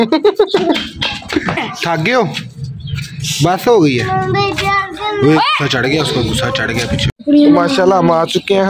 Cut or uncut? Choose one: cut